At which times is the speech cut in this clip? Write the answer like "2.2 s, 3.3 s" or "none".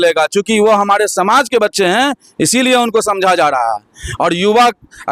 none